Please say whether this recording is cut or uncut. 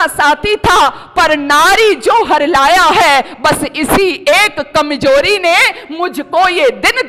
uncut